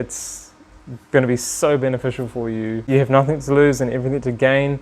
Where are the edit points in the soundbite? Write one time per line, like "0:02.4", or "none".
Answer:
0:02.8

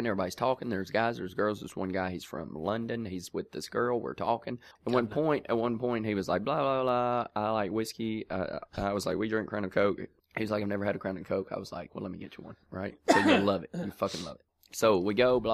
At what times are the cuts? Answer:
0:04.7

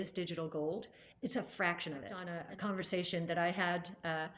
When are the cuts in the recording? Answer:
0:02.3

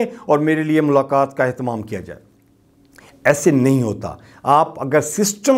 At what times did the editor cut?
none

